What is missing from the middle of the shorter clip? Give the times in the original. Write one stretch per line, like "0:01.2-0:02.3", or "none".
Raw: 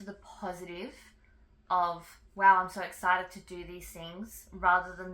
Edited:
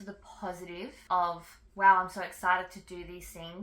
0:01.0-0:01.6